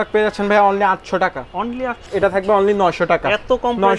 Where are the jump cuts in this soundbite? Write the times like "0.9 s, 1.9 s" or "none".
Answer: 2.0 s